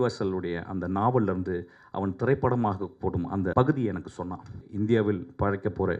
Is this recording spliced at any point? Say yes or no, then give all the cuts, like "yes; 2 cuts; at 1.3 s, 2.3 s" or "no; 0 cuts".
yes; 2 cuts; at 3.5 s, 4.7 s